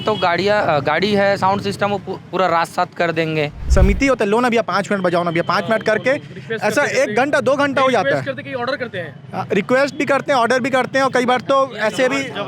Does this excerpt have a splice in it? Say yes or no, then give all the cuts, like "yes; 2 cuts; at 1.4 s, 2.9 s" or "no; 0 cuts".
yes; 1 cut; at 3.6 s